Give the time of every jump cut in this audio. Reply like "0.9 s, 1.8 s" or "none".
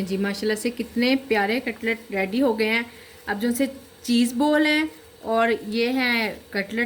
none